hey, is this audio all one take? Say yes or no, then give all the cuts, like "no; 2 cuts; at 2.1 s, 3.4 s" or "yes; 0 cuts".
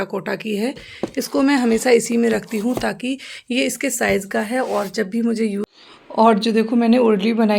no; 1 cut; at 5.7 s